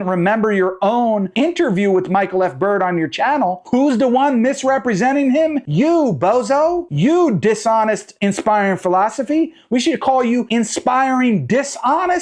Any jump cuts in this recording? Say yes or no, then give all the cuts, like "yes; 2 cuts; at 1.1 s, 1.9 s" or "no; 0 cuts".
no; 0 cuts